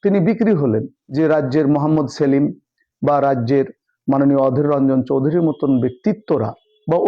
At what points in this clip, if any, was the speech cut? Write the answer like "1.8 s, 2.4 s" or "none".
1.0 s